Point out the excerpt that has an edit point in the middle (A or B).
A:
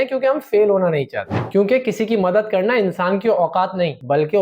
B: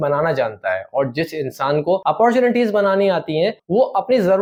A